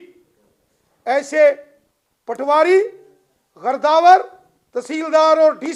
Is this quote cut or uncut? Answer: uncut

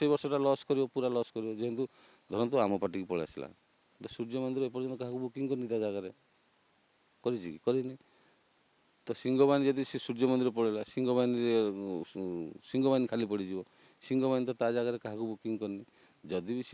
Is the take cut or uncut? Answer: uncut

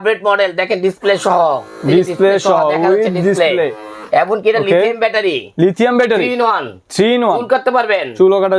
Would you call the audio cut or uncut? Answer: uncut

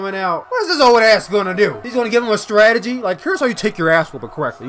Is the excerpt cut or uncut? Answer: cut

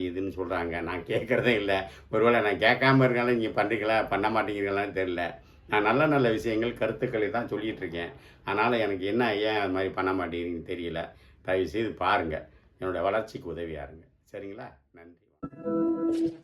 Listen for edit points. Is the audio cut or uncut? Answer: cut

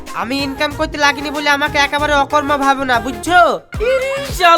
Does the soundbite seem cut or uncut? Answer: cut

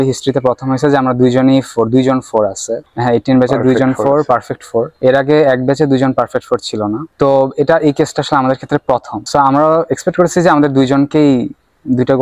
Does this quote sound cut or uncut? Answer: uncut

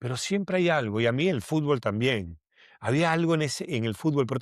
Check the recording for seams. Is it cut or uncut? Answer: uncut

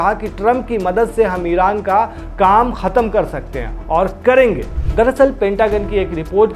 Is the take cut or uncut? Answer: cut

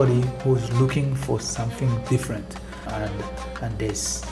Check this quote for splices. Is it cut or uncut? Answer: cut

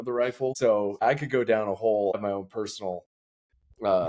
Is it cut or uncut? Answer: cut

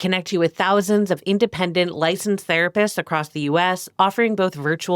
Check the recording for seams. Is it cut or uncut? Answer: uncut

